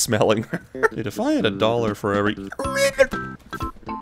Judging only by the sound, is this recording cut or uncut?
cut